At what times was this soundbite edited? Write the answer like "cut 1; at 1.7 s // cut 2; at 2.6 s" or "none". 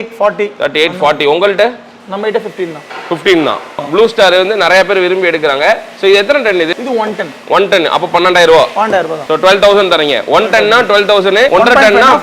none